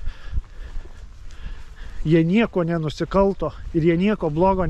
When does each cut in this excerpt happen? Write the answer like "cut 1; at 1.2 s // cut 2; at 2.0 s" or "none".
none